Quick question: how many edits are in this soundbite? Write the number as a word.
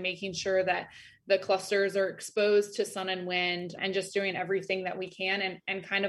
zero